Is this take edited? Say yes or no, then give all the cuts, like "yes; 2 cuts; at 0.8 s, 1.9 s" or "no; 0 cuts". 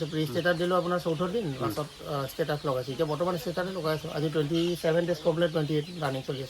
no; 0 cuts